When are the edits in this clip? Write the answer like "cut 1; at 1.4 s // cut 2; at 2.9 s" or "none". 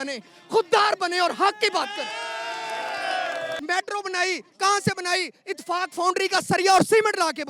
cut 1; at 3.6 s